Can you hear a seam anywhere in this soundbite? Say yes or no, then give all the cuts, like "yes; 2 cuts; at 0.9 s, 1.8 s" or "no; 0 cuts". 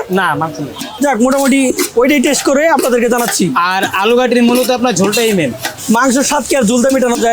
no; 0 cuts